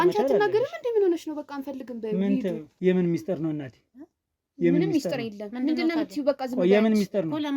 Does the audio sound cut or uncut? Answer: cut